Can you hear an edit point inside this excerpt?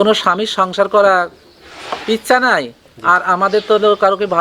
no; 0 cuts

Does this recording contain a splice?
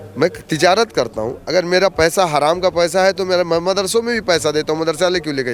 no; 0 cuts

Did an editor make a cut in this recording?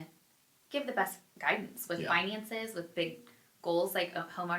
no; 0 cuts

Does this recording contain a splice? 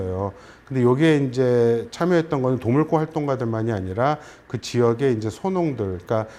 no; 0 cuts

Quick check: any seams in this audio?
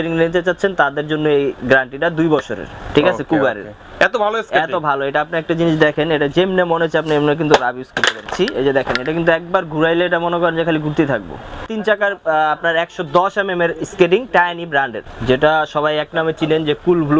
yes; 3 cuts; at 8.3 s, 11.7 s, 15.1 s

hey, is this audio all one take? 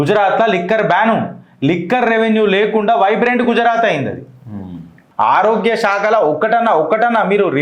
no; 1 cut; at 5.1 s

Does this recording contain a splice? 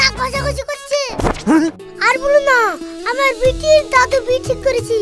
yes; 1 cut; at 1.9 s

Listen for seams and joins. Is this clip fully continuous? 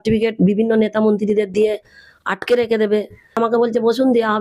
no; 1 cut; at 3.4 s

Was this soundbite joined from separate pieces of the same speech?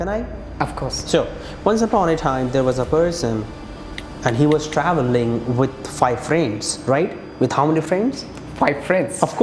no; 0 cuts

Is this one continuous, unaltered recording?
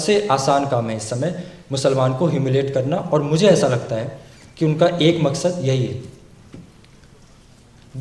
yes; 0 cuts

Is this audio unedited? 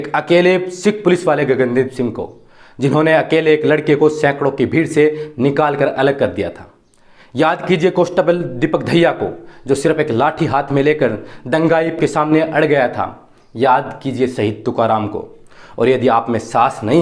yes; 0 cuts

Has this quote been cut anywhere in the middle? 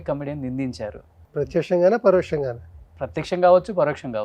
yes; 1 cut; at 1.1 s

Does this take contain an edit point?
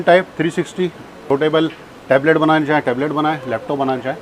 yes; 1 cut; at 1.1 s

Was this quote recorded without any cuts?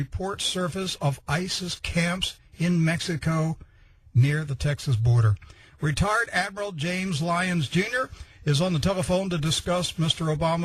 yes; 0 cuts

